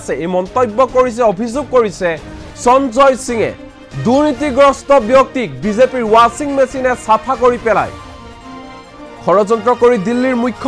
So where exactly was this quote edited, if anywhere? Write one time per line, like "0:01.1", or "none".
none